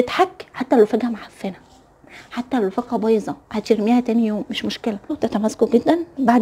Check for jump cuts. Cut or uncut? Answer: cut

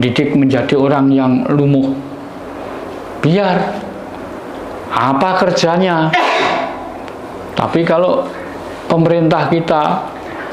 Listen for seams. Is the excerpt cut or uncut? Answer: uncut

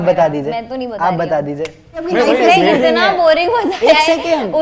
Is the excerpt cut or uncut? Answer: cut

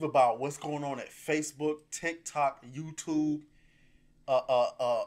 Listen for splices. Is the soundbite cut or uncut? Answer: uncut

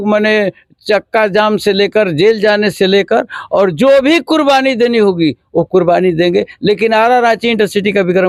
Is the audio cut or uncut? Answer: uncut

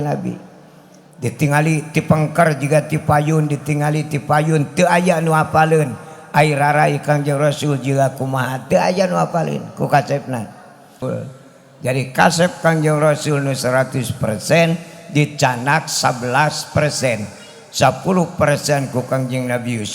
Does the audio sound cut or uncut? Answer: cut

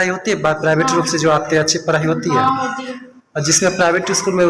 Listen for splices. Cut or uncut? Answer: uncut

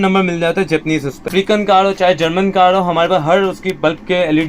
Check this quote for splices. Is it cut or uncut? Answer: cut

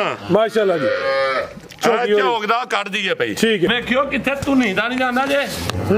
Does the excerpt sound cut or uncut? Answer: cut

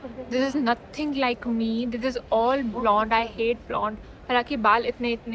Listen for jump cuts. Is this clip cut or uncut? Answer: uncut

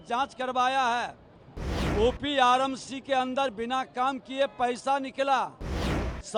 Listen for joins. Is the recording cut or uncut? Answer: uncut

